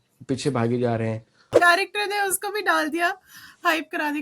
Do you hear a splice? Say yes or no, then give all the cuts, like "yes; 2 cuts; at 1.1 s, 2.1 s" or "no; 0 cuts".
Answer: yes; 1 cut; at 1.5 s